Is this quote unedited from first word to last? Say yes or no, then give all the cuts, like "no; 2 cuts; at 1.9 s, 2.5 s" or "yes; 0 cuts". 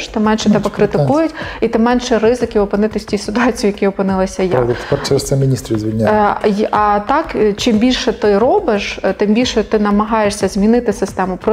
yes; 0 cuts